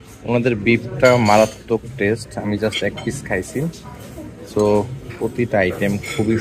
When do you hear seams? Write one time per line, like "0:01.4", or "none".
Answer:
none